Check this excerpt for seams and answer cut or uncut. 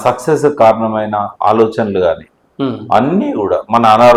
uncut